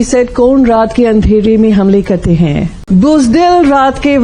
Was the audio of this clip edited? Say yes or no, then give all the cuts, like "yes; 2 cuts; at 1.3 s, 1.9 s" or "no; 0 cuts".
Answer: yes; 1 cut; at 2.8 s